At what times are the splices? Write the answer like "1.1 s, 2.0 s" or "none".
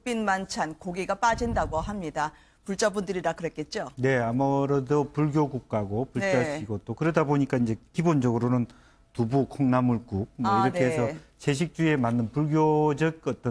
10.3 s